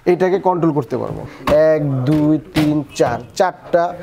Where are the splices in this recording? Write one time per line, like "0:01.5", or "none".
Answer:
0:01.2